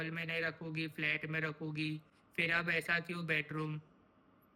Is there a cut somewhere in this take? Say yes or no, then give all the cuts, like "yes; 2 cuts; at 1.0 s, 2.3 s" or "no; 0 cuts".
no; 0 cuts